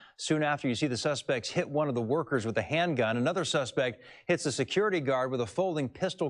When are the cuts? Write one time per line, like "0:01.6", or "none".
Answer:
0:01.9
0:05.3